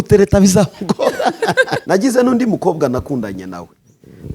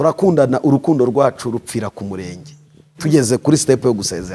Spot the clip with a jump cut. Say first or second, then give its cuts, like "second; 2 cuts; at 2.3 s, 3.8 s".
first; 1 cut; at 1.8 s